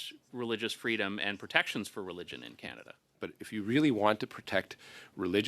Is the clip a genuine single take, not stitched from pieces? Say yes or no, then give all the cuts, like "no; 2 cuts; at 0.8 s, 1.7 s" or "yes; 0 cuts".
no; 1 cut; at 3.3 s